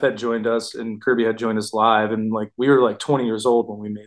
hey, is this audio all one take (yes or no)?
yes